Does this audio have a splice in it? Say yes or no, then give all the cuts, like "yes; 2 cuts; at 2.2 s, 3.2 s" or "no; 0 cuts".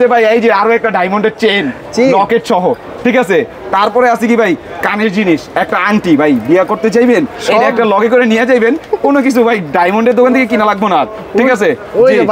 no; 0 cuts